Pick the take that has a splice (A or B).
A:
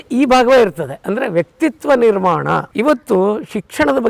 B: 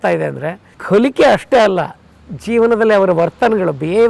A